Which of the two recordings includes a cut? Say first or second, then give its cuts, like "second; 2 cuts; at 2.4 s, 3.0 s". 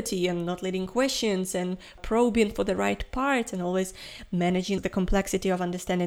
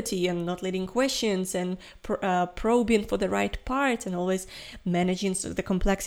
first; 2 cuts; at 2.0 s, 4.8 s